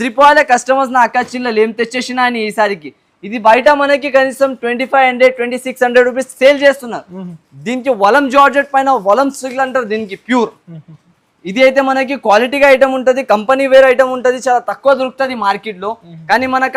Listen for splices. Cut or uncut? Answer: uncut